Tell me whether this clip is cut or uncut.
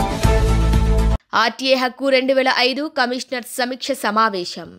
uncut